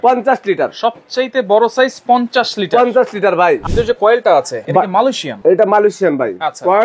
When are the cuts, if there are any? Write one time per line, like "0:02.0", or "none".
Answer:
0:03.7
0:05.0